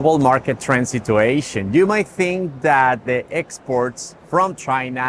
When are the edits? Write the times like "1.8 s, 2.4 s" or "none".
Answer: none

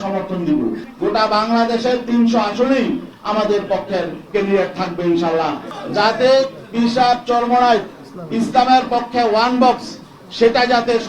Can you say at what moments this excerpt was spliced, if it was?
0.9 s, 5.7 s

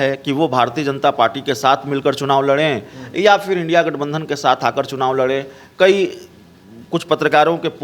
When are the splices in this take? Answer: none

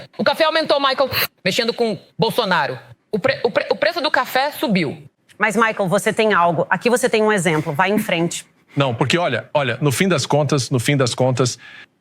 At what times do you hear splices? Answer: 5.1 s

